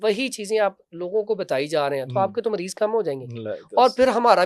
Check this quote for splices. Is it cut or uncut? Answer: uncut